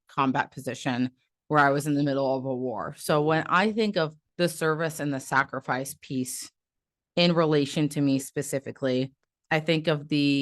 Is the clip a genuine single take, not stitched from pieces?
no; 1 cut; at 4.2 s

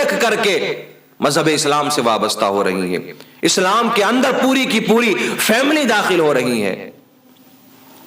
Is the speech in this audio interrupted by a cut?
no; 0 cuts

